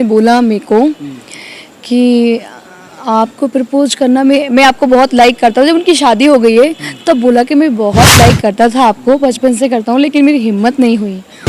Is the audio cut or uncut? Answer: uncut